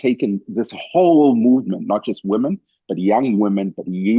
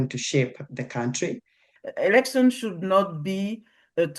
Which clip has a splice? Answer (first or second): second